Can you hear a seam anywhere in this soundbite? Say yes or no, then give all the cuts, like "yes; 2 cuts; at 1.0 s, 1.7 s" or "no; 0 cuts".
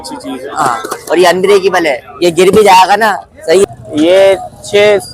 yes; 1 cut; at 3.6 s